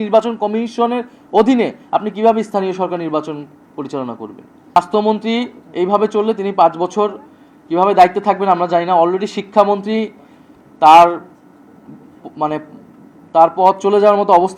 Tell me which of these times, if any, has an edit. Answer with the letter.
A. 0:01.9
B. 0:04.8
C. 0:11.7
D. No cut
B